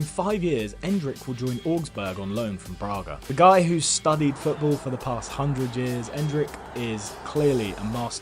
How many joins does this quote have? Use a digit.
0